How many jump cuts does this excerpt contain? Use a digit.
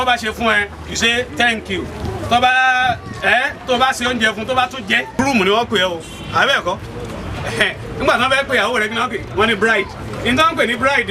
1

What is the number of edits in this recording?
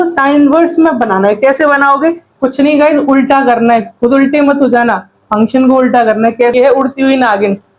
1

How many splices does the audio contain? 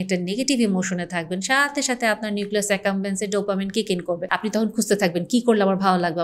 1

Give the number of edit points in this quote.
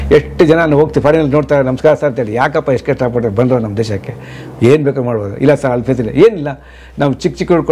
0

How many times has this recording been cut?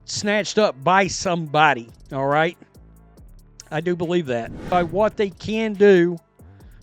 1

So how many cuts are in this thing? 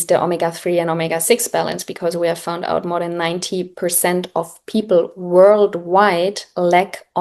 0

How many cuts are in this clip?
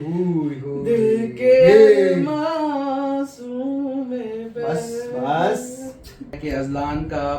1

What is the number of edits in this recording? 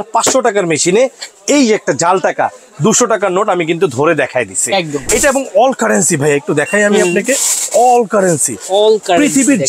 1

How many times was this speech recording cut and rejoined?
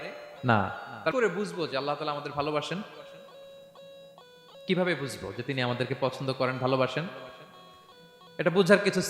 1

